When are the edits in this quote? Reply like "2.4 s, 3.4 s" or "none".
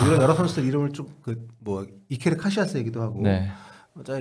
none